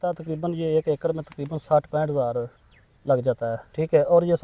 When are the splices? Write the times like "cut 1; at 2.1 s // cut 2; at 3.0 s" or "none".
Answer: none